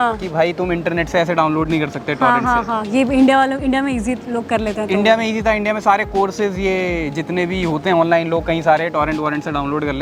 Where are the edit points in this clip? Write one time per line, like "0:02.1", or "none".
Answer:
none